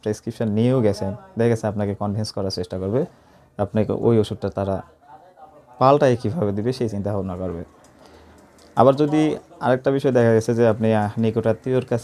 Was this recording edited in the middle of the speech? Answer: no; 0 cuts

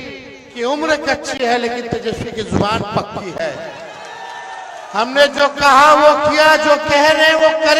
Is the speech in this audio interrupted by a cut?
no; 0 cuts

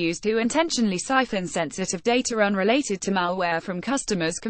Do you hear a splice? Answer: no; 0 cuts

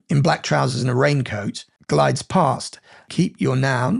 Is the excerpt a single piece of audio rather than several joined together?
no; 1 cut; at 3.0 s

